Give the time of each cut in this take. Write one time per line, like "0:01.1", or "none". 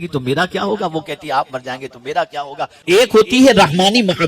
0:02.8